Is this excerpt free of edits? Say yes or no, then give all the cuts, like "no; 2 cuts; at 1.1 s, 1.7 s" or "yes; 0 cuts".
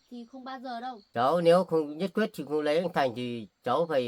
no; 1 cut; at 1.0 s